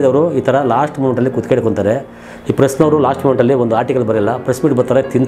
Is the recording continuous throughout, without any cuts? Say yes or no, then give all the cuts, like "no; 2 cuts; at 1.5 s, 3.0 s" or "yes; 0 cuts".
yes; 0 cuts